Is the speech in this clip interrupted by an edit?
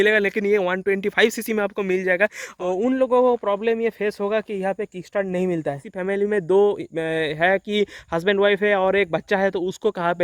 yes; 2 cuts; at 2.5 s, 5.8 s

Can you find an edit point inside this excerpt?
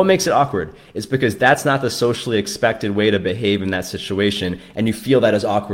no; 0 cuts

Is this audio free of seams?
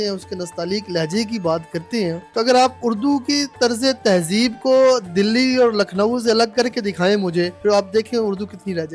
no; 2 cuts; at 2.2 s, 7.5 s

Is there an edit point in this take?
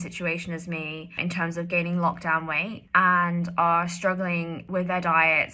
yes; 3 cuts; at 1.2 s, 2.7 s, 4.6 s

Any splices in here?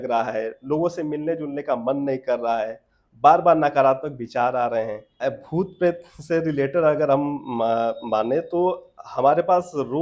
yes; 1 cut; at 5.1 s

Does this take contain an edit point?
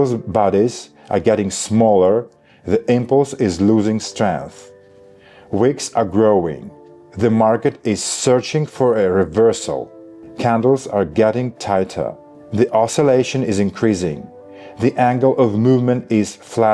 no; 0 cuts

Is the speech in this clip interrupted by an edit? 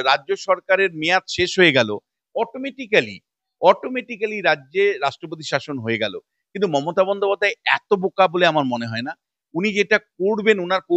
no; 0 cuts

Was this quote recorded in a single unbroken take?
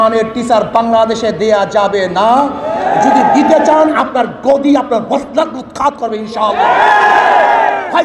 yes; 0 cuts

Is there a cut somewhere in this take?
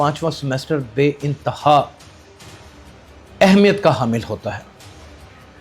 yes; 2 cuts; at 1.9 s, 3.3 s

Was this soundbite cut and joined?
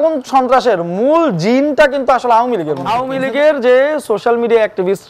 yes; 1 cut; at 3.1 s

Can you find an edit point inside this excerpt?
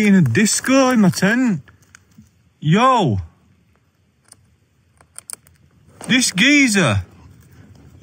no; 0 cuts

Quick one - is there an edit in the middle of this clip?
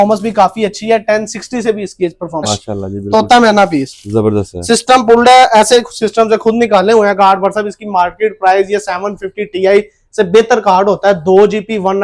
yes; 1 cut; at 2.5 s

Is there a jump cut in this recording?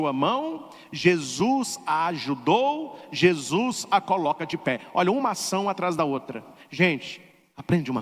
no; 0 cuts

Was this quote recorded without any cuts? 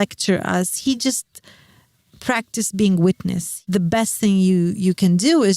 no; 1 cut; at 3.5 s

